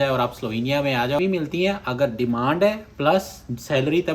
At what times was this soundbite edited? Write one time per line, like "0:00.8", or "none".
0:01.2